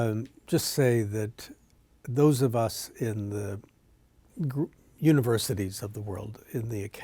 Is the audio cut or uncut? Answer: uncut